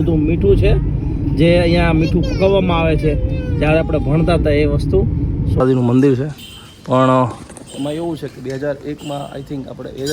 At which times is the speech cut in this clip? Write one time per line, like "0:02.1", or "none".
0:05.6